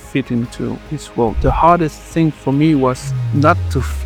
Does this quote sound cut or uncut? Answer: cut